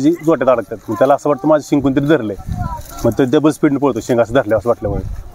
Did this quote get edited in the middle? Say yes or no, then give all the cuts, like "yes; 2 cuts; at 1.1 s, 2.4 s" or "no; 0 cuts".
no; 0 cuts